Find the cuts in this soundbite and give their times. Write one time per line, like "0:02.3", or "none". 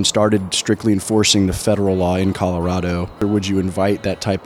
0:03.2